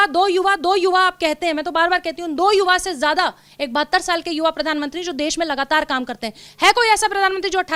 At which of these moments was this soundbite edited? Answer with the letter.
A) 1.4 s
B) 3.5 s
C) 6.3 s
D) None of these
D